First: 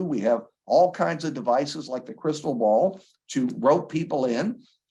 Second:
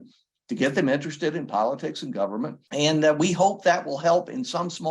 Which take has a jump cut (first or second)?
second